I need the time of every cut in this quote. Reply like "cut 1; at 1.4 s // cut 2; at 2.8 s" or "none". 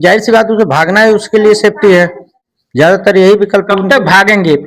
cut 1; at 2.8 s